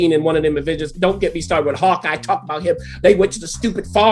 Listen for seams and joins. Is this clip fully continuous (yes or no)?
yes